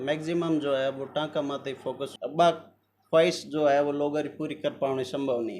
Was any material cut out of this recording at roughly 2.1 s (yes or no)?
yes